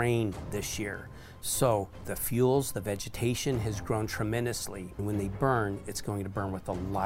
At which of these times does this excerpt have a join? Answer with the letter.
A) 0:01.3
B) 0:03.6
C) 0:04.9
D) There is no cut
C